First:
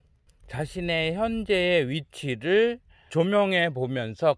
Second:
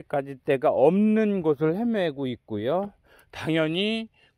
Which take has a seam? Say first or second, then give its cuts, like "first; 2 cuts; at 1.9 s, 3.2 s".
first; 1 cut; at 3.1 s